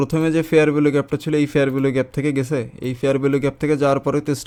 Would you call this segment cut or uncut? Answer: uncut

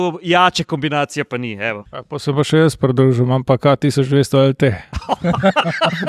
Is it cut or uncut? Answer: cut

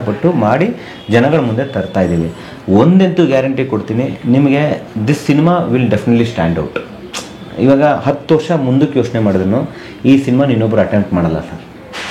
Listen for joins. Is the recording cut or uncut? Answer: uncut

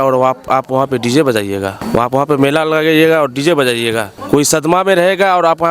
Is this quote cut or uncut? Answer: cut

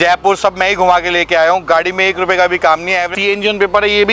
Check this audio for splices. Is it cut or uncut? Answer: cut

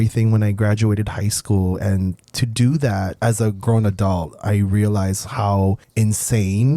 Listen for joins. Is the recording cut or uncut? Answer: cut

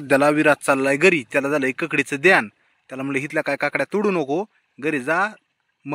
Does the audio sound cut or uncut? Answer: uncut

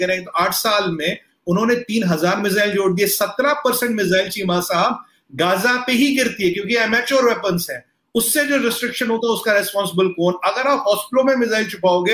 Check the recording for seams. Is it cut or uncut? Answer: uncut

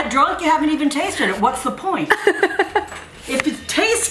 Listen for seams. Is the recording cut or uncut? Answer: uncut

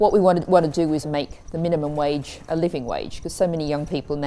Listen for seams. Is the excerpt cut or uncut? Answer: cut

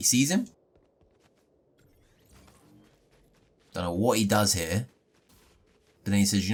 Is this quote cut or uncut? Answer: uncut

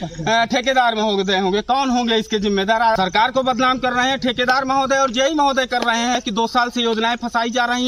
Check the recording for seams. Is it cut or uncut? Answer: cut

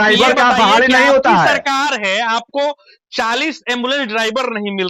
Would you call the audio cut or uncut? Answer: uncut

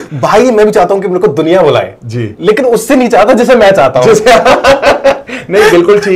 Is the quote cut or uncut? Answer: uncut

